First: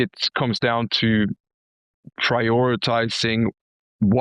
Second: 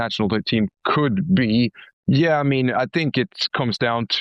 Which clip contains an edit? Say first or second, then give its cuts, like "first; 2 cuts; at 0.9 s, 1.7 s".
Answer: second; 1 cut; at 1.9 s